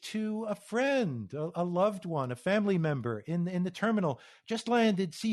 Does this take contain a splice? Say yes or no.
no